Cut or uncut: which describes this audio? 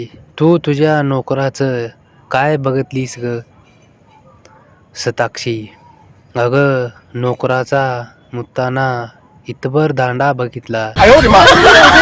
cut